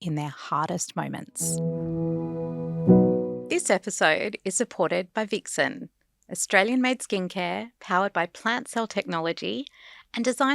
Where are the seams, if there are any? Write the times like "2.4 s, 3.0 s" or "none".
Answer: 1.3 s, 3.4 s